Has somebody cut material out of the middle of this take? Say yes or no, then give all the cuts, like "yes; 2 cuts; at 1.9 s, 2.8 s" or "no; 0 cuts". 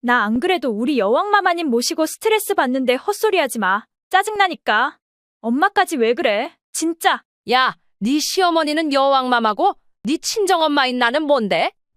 yes; 1 cut; at 7.3 s